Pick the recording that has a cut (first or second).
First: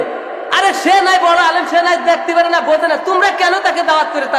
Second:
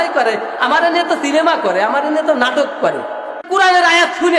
second